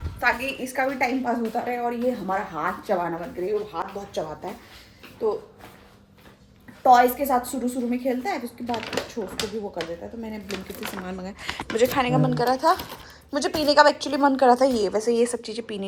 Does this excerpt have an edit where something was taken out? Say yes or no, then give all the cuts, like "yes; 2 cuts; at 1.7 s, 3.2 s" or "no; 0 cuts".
no; 0 cuts